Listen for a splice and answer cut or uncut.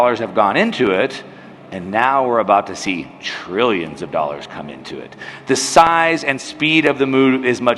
uncut